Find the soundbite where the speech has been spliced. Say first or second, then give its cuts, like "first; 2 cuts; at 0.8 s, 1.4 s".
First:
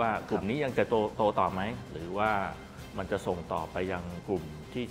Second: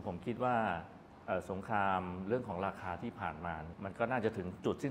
second; 1 cut; at 3.7 s